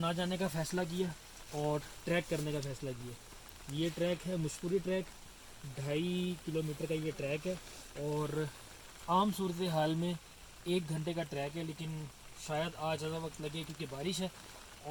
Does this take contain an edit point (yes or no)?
no